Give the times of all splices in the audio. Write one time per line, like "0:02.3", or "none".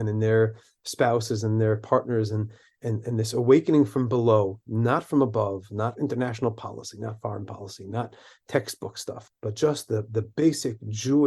0:09.1